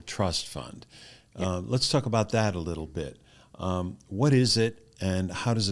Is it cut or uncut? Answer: uncut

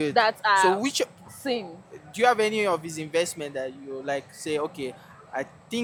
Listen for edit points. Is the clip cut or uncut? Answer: uncut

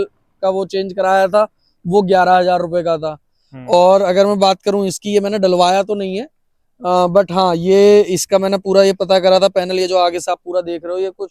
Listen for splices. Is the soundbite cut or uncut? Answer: uncut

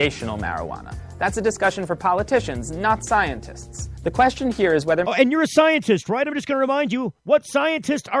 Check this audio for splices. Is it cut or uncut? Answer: uncut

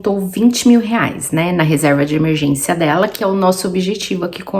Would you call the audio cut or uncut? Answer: uncut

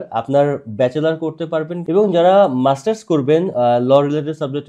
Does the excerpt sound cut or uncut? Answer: cut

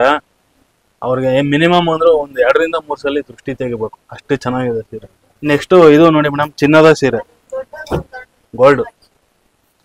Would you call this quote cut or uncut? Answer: cut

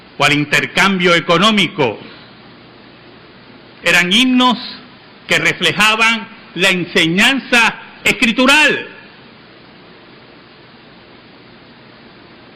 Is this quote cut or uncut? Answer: uncut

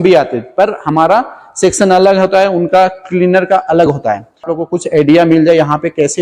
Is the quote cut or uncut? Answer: cut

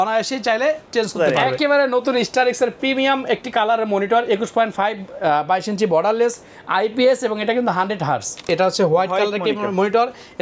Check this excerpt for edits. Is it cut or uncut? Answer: cut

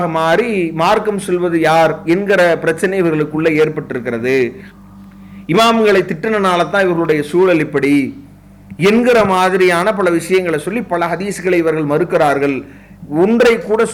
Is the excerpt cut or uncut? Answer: uncut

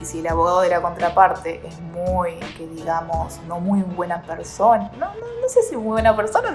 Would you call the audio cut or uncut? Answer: uncut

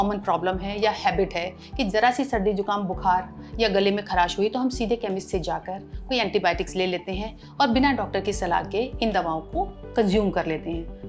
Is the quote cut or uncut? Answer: uncut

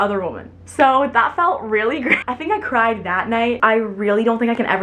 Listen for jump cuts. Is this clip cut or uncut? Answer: cut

